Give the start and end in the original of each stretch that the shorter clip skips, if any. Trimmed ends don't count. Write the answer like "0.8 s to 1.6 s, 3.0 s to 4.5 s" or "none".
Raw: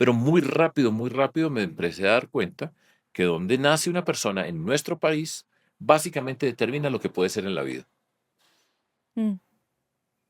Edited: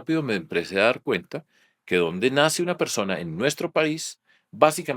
none